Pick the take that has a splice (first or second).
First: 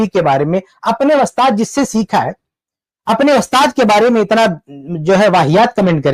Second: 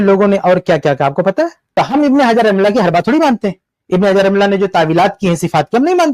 second